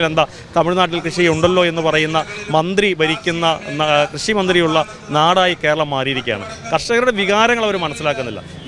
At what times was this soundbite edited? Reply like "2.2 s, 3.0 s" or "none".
none